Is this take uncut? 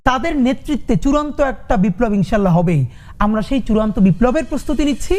yes; 0 cuts

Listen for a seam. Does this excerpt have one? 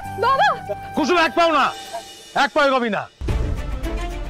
no; 0 cuts

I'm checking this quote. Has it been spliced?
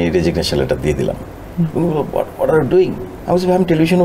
yes; 1 cut; at 3.1 s

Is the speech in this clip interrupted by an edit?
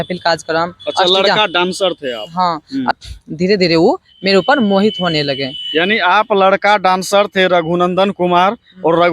yes; 1 cut; at 3.0 s

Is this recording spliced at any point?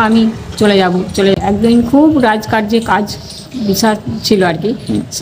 yes; 1 cut; at 1.4 s

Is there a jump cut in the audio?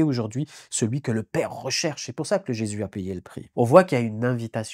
yes; 1 cut; at 3.4 s

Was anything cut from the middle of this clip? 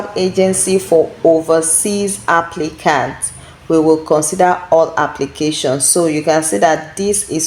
no; 0 cuts

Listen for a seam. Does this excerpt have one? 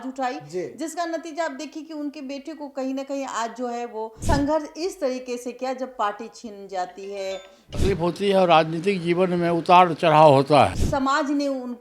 yes; 3 cuts; at 4.1 s, 7.7 s, 10.8 s

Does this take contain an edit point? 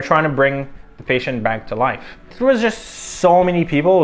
no; 0 cuts

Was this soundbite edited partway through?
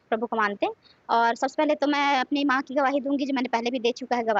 no; 0 cuts

